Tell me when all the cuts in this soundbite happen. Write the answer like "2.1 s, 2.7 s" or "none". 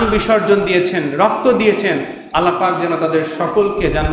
none